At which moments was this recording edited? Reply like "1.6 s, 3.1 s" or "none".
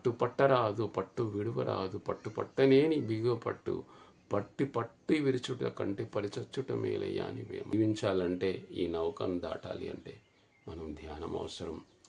7.7 s